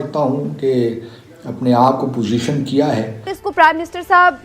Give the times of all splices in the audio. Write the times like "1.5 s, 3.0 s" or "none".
3.1 s